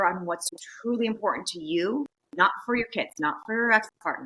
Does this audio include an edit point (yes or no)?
no